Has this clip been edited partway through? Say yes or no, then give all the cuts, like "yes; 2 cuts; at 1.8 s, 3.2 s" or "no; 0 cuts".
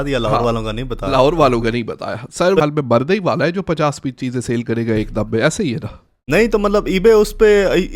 yes; 1 cut; at 2.6 s